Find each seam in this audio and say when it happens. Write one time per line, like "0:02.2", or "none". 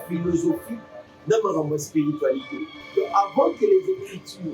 0:02.8